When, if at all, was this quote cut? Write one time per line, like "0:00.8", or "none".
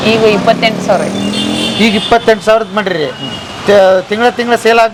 none